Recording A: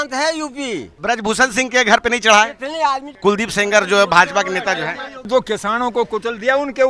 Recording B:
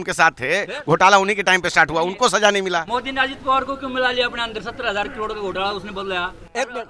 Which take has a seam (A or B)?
A